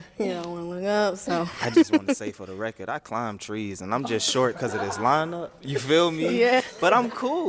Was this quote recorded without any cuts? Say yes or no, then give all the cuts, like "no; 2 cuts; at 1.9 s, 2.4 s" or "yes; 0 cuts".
no; 1 cut; at 1.2 s